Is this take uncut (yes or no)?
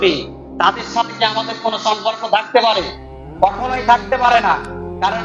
yes